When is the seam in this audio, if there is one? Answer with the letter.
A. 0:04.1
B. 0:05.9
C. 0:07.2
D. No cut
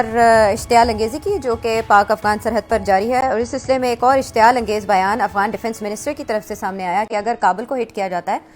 D